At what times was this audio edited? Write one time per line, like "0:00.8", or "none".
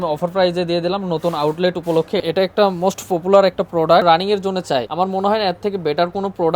0:02.2
0:04.7

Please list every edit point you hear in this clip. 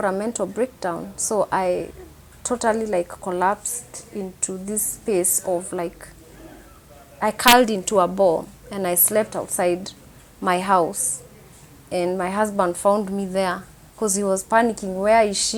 none

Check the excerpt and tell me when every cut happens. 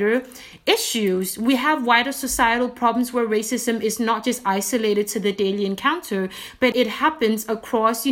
0:06.7

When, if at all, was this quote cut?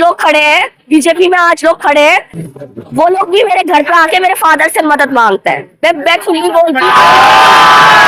0:06.8

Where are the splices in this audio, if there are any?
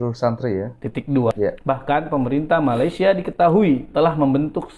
0:01.3

